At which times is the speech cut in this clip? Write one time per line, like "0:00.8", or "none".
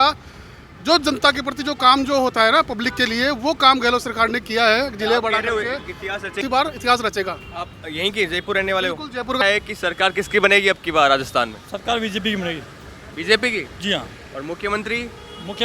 0:06.4
0:09.4